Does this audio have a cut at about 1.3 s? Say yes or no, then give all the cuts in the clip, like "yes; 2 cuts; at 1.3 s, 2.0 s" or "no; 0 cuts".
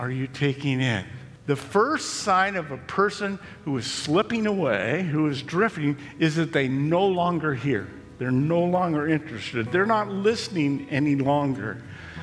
yes; 1 cut; at 1.3 s